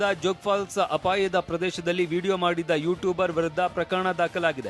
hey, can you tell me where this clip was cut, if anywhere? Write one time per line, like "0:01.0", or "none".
none